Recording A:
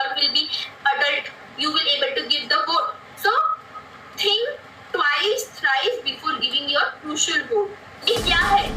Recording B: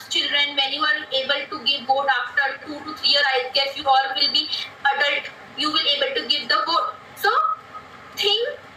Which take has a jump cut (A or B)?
A